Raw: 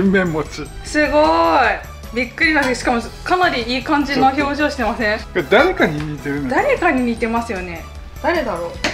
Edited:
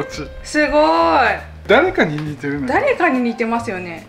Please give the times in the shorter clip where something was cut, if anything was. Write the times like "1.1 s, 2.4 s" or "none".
1.6 s